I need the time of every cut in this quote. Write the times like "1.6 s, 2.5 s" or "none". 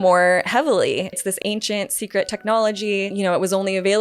1.2 s, 3.1 s